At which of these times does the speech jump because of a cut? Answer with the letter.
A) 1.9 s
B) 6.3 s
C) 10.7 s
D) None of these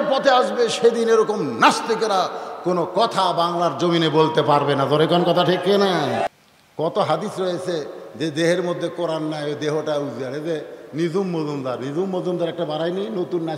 B